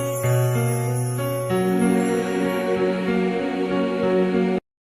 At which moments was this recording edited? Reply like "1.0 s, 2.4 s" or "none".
1.5 s